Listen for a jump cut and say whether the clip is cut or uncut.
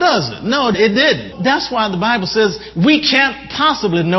cut